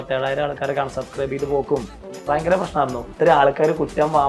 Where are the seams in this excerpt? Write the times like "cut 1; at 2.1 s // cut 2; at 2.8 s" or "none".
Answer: cut 1; at 3.1 s